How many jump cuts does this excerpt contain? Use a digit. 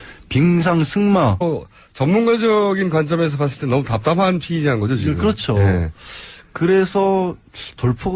0